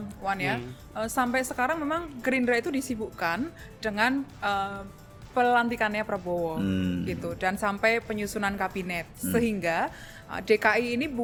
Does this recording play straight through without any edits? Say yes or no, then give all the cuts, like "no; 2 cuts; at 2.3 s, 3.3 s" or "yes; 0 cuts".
yes; 0 cuts